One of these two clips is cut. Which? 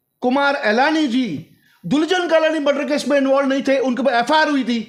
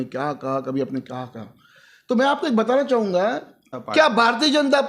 second; 1 cut; at 3.6 s

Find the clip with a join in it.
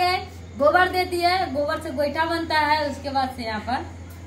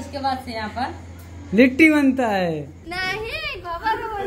second; 1 cut; at 2.9 s

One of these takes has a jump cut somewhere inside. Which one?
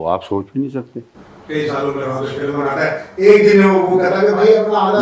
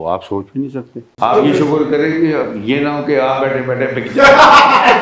second; 1 cut; at 1.0 s

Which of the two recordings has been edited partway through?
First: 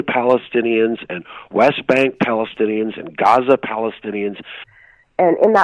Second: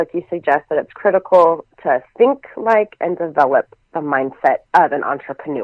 first; 1 cut; at 4.7 s

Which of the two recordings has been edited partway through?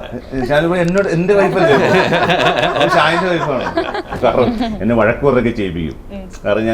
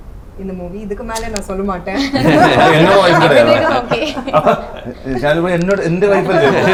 first; 1 cut; at 4.1 s

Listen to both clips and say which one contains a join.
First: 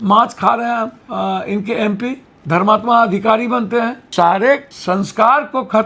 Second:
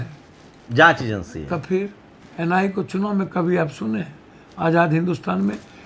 first; 4 cuts; at 1.0 s, 2.3 s, 4.0 s, 4.7 s

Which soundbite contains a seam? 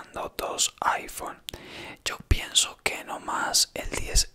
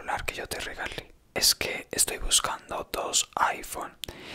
second; 1 cut; at 1.4 s

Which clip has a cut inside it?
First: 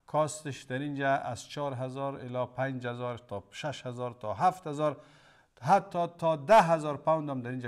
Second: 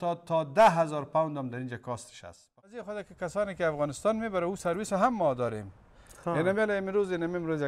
second; 1 cut; at 2.7 s

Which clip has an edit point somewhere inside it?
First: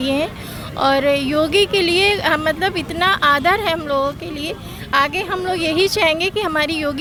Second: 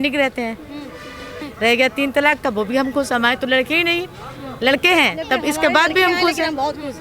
second; 1 cut; at 1.4 s

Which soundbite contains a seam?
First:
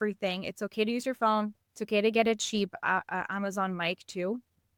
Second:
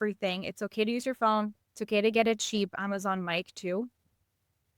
second; 1 cut; at 2.8 s

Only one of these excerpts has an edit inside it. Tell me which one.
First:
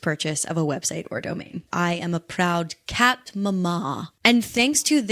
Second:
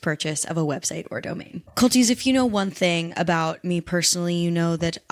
first; 2 cuts; at 1.6 s, 4.1 s

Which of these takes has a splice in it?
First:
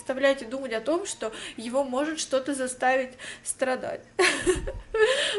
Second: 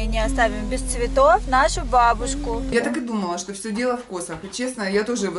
second; 1 cut; at 2.7 s

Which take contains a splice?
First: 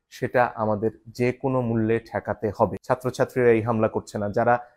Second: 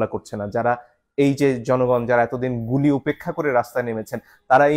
first; 1 cut; at 2.8 s

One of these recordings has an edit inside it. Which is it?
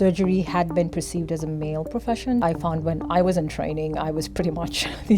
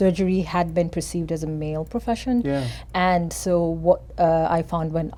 first; 1 cut; at 2.4 s

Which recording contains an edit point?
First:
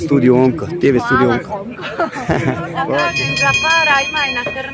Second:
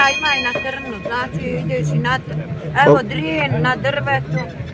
first; 1 cut; at 3.0 s

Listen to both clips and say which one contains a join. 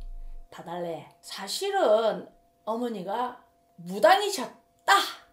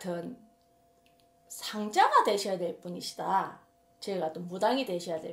first; 1 cut; at 1.1 s

